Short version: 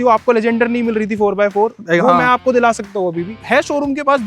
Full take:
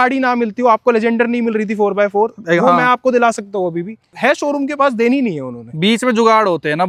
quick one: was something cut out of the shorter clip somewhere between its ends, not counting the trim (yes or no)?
yes